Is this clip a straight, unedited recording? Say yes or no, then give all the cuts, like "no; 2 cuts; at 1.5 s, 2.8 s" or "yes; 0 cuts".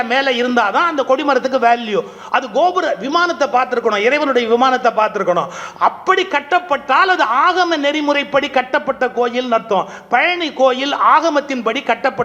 yes; 0 cuts